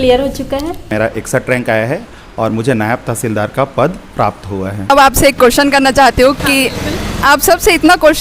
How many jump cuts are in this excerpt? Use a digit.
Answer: 2